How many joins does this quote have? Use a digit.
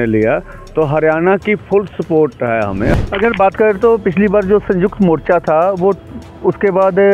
1